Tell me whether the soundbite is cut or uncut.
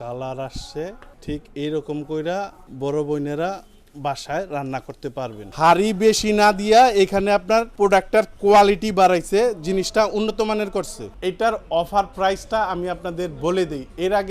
cut